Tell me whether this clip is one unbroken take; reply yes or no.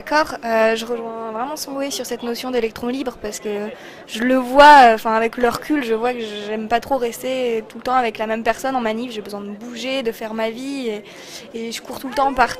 yes